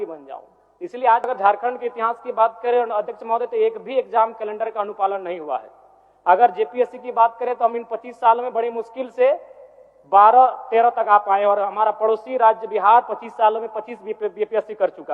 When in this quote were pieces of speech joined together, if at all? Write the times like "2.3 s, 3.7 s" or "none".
1.3 s